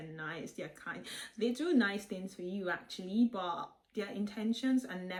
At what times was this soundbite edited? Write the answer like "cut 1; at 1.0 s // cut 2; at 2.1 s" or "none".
none